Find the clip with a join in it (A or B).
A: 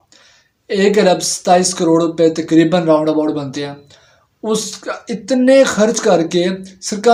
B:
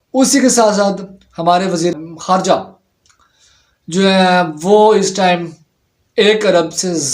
B